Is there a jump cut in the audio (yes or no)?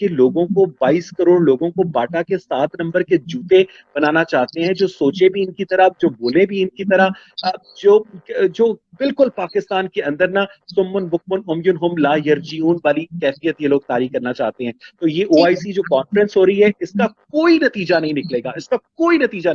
no